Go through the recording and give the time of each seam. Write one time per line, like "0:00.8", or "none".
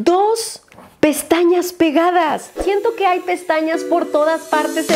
0:02.6